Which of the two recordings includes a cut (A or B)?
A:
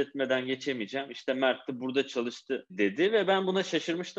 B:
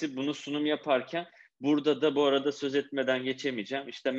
A